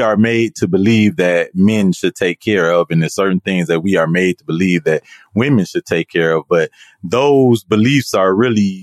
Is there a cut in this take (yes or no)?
no